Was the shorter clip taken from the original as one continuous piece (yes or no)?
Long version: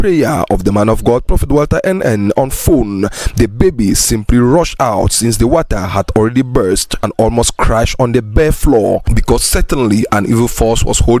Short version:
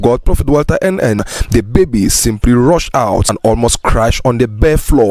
no